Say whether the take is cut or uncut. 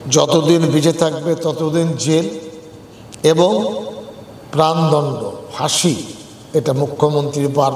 uncut